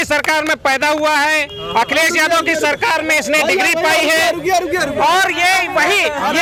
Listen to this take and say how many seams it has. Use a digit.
0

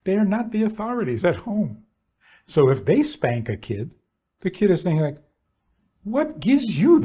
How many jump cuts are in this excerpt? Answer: 0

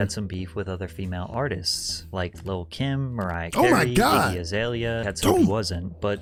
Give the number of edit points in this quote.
0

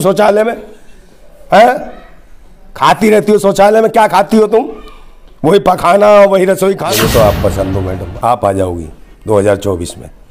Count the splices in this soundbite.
1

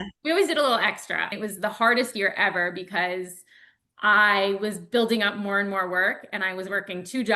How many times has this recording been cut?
1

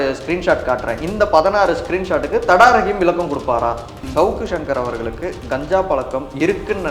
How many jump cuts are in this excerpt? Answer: 1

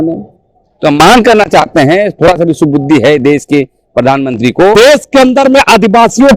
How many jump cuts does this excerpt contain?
1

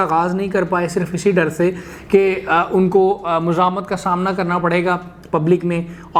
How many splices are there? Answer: 0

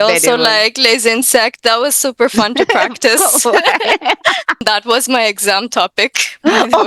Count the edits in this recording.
1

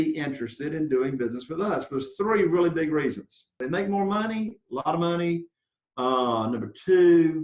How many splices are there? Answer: 1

